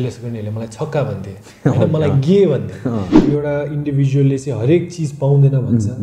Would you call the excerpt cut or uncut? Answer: cut